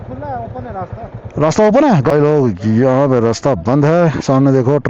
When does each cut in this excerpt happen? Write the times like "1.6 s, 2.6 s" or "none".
2.1 s